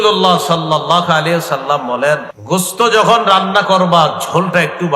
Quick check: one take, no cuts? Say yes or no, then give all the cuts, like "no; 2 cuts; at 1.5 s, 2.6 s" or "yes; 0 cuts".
no; 1 cut; at 2.3 s